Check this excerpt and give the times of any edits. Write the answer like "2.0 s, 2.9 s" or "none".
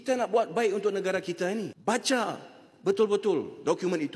1.7 s